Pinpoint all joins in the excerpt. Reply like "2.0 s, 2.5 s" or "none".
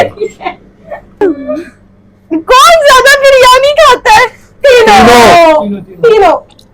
1.2 s

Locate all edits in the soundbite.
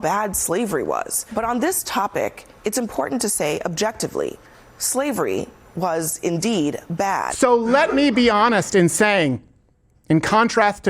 1.3 s, 7.2 s

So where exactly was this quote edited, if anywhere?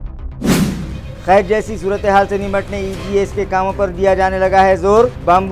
1.0 s

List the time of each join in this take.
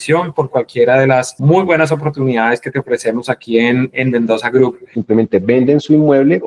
4.9 s

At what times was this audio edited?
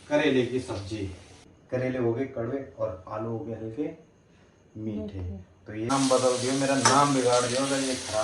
1.5 s, 5.9 s

